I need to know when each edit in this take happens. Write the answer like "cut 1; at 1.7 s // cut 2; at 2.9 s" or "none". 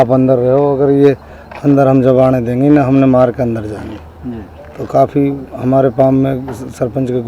none